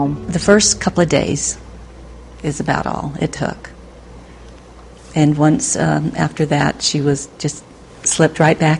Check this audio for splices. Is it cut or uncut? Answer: cut